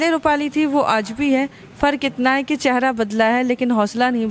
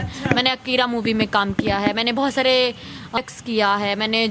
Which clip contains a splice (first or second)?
second